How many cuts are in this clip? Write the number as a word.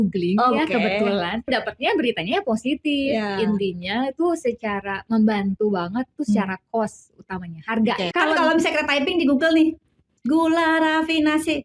two